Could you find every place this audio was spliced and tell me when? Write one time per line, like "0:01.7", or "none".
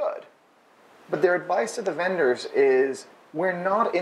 none